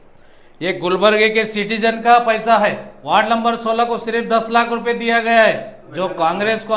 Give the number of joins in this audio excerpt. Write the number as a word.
two